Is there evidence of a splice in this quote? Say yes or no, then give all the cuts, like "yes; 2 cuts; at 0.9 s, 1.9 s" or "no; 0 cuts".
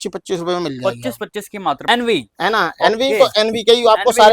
yes; 1 cut; at 1.8 s